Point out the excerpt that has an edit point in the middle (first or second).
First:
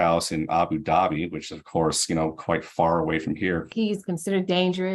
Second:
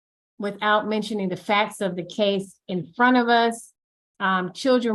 first